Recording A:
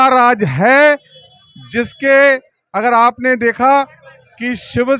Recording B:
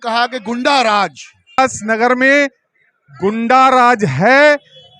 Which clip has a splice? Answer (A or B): B